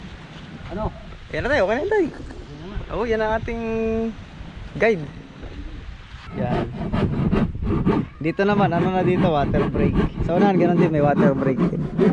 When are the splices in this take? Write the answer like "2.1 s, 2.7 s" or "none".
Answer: 6.3 s

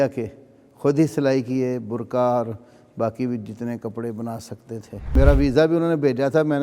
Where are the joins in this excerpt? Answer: 5.2 s

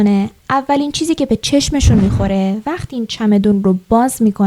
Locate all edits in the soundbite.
none

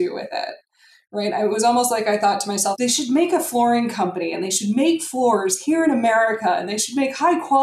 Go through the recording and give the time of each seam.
2.8 s

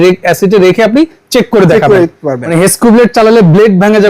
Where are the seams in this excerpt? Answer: 2.4 s

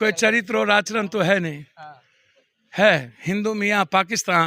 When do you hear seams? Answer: none

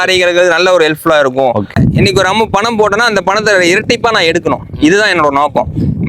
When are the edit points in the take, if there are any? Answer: 1.7 s

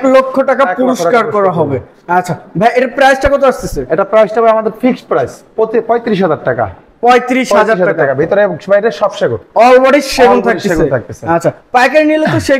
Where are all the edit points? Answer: none

